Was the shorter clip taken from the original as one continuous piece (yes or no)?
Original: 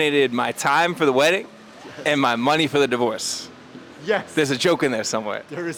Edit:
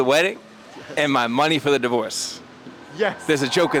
yes